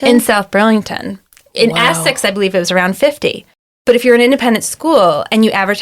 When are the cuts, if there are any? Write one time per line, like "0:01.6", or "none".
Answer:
0:03.8